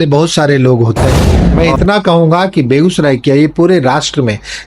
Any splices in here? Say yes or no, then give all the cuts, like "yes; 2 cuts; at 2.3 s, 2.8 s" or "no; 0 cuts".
yes; 1 cut; at 1.4 s